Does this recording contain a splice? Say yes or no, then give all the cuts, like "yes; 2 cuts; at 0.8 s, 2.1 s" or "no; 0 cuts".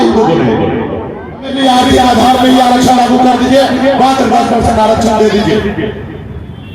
yes; 1 cut; at 1.5 s